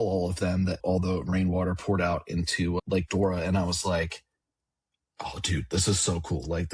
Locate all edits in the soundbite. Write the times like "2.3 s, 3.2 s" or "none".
0.8 s, 2.8 s